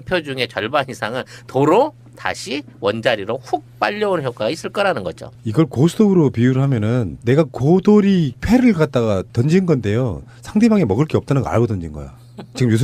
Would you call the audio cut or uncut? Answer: cut